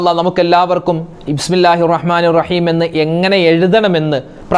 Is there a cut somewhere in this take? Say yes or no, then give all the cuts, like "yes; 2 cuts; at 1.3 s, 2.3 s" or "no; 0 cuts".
no; 0 cuts